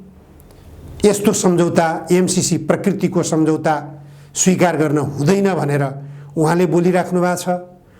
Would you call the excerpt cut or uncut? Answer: uncut